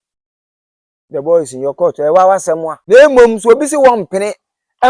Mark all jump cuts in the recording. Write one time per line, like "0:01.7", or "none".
0:02.7